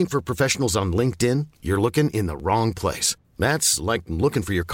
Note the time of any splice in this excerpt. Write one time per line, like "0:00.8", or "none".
none

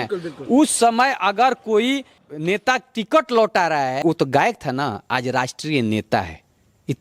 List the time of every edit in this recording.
0:02.3
0:04.0

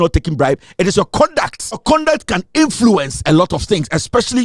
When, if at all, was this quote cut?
0:01.8

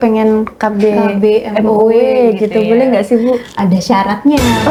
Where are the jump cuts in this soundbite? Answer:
none

